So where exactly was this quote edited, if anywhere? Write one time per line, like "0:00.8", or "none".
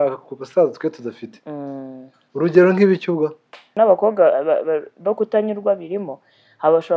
0:03.7